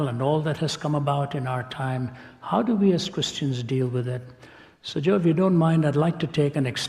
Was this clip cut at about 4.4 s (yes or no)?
no